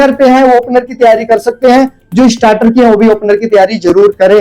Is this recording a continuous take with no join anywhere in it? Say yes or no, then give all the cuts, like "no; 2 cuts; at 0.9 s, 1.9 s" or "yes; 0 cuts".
yes; 0 cuts